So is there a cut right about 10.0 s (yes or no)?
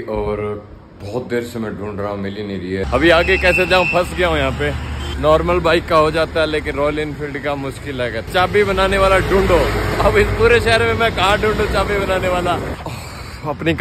no